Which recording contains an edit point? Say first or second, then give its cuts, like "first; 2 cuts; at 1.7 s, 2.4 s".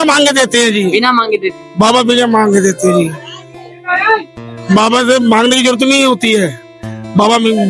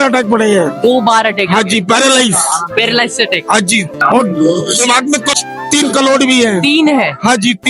second; 2 cuts; at 4.0 s, 5.3 s